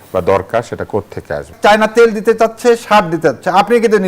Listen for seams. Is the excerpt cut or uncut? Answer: cut